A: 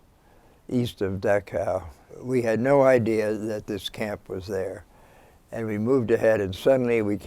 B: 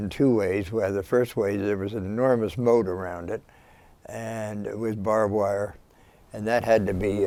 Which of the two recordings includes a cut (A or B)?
A